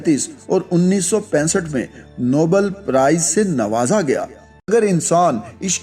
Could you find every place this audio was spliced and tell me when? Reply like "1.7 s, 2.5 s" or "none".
4.7 s